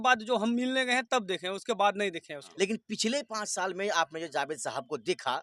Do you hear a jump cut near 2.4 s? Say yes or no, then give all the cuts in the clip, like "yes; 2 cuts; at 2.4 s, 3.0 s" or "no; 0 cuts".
yes; 1 cut; at 2.4 s